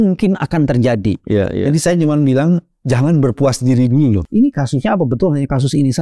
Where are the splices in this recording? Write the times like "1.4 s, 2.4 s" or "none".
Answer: 4.2 s